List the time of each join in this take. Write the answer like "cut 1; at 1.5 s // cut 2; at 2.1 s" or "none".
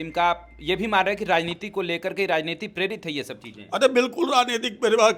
none

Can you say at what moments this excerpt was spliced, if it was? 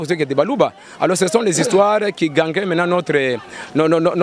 none

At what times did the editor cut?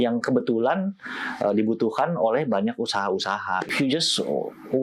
cut 1; at 3.7 s

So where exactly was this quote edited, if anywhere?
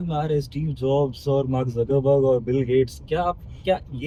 none

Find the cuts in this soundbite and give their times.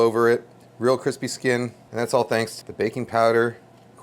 cut 1; at 1.8 s // cut 2; at 2.6 s

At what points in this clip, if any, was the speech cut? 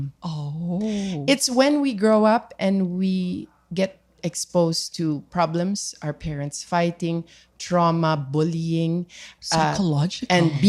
none

